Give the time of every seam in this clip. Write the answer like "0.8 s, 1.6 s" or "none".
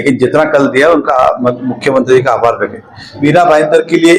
3.2 s